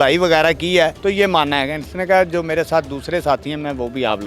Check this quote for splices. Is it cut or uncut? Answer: cut